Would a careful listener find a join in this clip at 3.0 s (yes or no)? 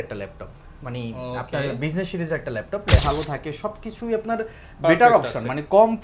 yes